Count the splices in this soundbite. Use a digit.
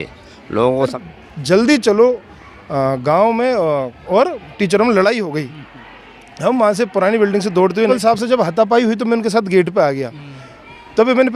2